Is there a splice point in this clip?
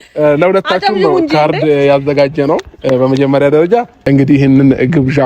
yes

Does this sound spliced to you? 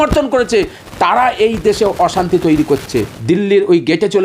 yes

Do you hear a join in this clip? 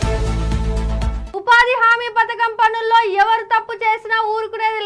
no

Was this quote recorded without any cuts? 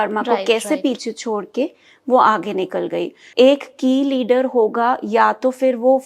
no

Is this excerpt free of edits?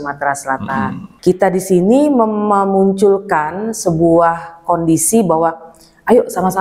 no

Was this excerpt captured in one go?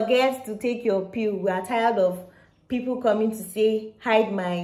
yes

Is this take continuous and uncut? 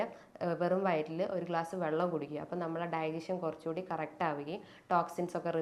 yes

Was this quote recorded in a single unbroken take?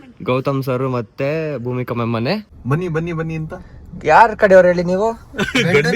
no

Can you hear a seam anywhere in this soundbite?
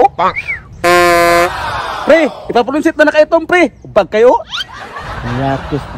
no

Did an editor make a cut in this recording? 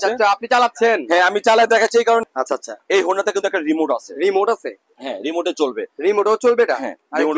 yes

